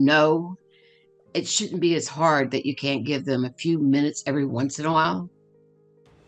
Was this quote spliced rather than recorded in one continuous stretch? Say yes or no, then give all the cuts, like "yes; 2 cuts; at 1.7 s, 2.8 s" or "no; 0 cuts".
no; 0 cuts